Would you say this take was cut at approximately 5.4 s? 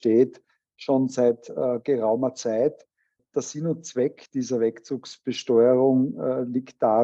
no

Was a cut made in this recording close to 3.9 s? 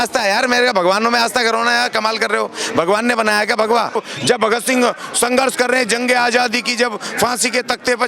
yes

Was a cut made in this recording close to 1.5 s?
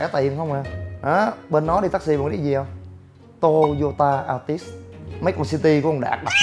no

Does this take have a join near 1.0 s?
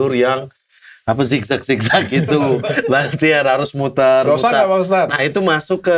no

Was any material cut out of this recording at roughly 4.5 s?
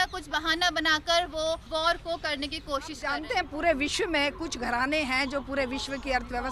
no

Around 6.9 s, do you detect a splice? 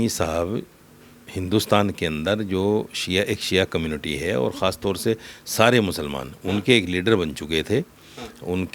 no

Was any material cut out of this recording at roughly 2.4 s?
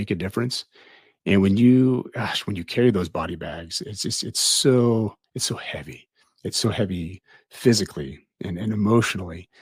no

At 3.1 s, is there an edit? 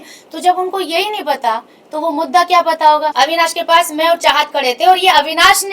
yes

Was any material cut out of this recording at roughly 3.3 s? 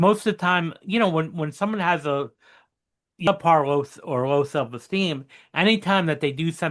yes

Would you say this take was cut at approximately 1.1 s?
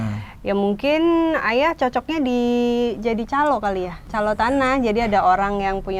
no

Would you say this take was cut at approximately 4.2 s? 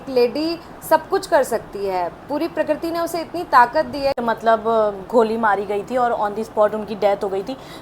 yes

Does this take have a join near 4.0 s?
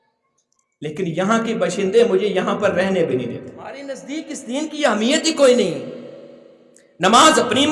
yes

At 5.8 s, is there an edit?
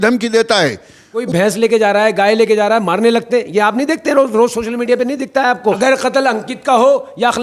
yes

